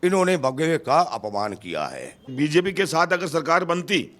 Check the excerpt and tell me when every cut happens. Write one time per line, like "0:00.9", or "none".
0:02.3